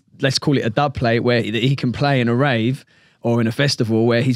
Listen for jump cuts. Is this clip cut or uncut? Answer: uncut